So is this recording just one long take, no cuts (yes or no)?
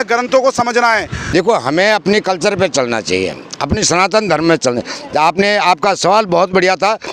no